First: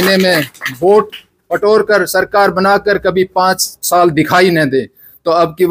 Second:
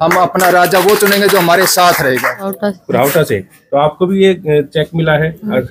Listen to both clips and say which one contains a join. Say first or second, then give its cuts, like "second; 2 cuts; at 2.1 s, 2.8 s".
second; 1 cut; at 2.5 s